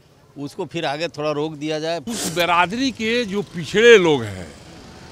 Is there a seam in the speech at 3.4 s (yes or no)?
no